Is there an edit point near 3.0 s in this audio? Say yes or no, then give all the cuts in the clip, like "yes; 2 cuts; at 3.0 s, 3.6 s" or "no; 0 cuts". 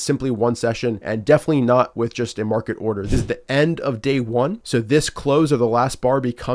yes; 3 cuts; at 1.0 s, 3.0 s, 4.6 s